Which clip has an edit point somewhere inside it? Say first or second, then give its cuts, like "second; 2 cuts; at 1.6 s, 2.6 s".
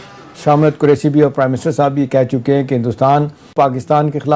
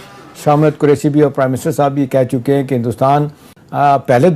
second; 1 cut; at 3.4 s